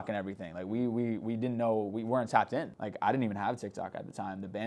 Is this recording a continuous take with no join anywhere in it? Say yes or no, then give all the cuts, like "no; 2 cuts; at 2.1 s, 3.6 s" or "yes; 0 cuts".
no; 1 cut; at 2.7 s